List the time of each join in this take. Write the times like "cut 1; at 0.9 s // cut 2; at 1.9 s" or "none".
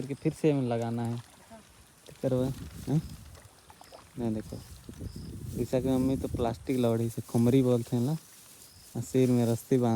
none